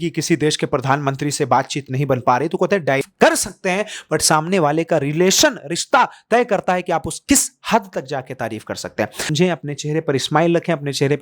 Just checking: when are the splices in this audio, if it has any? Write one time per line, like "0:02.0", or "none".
0:03.0
0:09.3